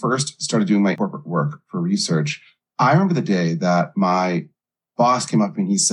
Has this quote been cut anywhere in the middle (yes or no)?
yes